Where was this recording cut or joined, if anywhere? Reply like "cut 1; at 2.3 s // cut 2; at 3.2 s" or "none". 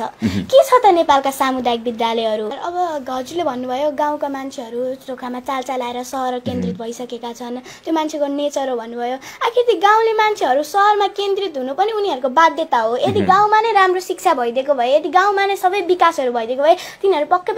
cut 1; at 2.6 s